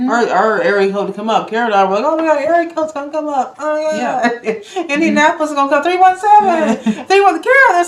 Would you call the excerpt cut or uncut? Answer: uncut